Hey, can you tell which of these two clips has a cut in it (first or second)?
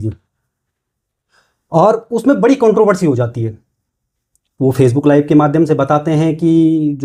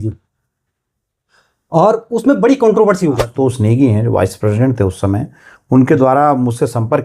second